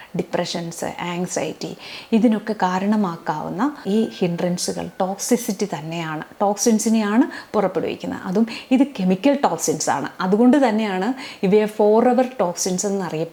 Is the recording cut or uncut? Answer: uncut